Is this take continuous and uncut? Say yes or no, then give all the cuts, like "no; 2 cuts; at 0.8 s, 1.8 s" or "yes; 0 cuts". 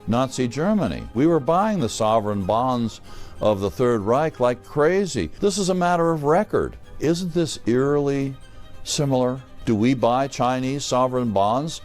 no; 4 cuts; at 1.1 s, 5.3 s, 6.8 s, 9.5 s